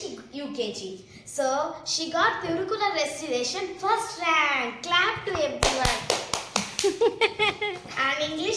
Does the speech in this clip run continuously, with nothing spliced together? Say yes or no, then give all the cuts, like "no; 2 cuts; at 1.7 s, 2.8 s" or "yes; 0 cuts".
yes; 0 cuts